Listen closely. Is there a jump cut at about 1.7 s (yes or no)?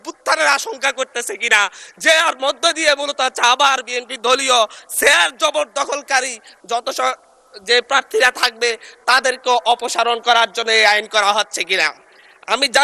no